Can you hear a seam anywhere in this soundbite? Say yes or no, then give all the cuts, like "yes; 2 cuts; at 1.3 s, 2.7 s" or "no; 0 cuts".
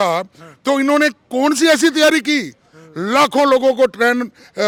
no; 0 cuts